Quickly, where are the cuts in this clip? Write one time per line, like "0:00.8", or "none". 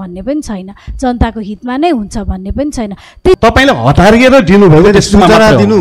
0:03.4